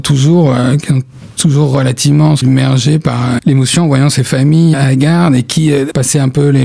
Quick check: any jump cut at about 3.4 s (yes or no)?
yes